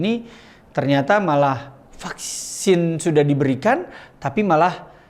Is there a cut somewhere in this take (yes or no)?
no